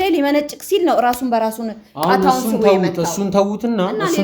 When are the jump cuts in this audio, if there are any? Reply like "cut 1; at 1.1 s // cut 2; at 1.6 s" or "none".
none